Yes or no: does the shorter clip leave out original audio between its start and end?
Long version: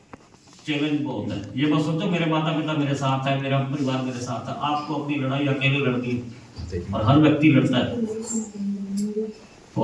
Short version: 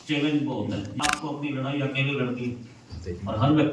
yes